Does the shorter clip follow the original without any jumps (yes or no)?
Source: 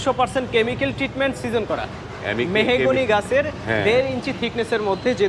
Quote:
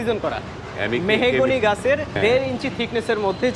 no